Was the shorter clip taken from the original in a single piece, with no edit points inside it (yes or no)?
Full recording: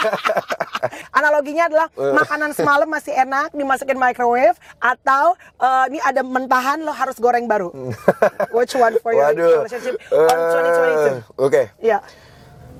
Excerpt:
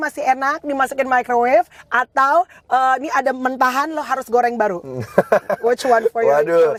yes